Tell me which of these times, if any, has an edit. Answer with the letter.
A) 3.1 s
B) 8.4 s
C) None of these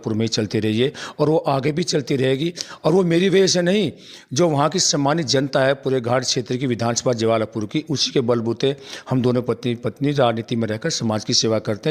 C